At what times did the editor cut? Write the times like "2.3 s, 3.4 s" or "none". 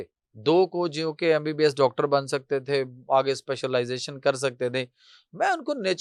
none